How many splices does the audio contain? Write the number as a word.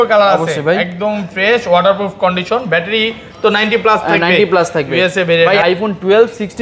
one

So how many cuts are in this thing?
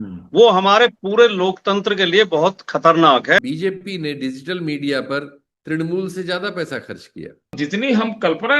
two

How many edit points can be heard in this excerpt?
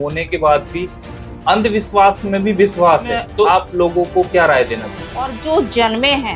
two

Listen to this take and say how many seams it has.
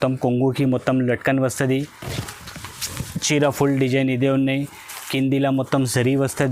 zero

